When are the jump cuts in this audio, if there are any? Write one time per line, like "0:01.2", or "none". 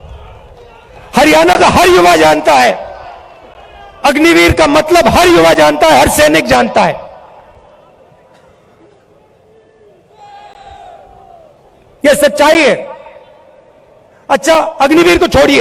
none